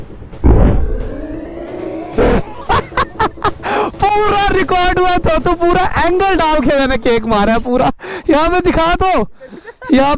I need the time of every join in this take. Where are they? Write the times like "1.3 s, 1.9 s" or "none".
none